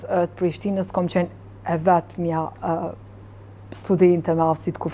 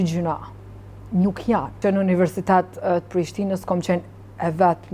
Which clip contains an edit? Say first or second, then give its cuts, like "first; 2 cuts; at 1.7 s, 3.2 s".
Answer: second; 1 cut; at 1.8 s